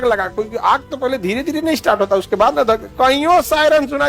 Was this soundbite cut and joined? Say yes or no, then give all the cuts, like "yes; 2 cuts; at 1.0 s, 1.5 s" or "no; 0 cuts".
no; 0 cuts